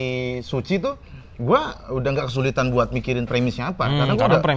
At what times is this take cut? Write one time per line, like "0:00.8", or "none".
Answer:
none